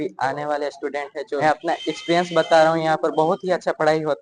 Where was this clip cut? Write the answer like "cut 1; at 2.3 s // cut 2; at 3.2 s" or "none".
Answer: cut 1; at 1.4 s